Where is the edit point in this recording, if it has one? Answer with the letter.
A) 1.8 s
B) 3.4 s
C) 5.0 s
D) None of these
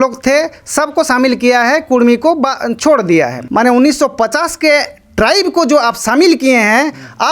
B